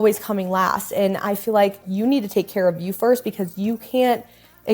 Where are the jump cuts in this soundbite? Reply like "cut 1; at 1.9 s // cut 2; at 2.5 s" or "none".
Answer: cut 1; at 1.9 s

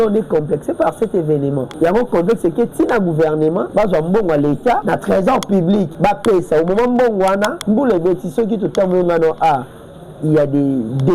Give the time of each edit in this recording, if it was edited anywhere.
cut 1; at 1.7 s // cut 2; at 3.7 s // cut 3; at 4.8 s // cut 4; at 5.9 s // cut 5; at 7.6 s

